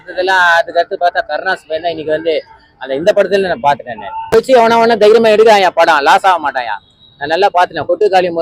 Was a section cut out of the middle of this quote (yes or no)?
yes